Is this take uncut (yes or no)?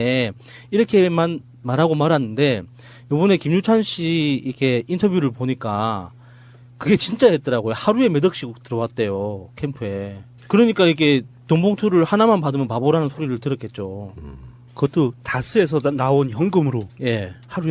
yes